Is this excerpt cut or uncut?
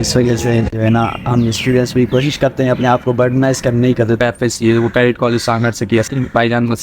cut